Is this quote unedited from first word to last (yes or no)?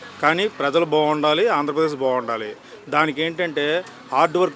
yes